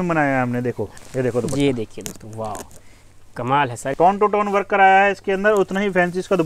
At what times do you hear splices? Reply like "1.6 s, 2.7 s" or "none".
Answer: 0.9 s, 3.9 s